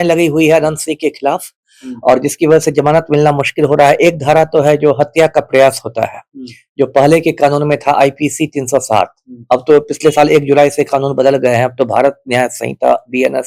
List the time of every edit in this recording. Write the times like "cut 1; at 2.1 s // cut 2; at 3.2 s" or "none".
none